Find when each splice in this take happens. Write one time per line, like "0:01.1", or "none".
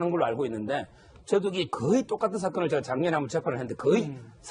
0:01.8